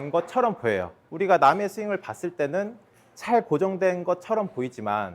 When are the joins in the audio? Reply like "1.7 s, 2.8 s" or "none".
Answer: 1.0 s